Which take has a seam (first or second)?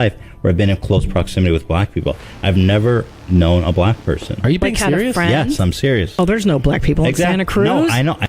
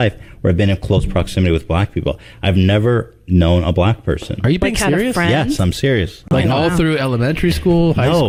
first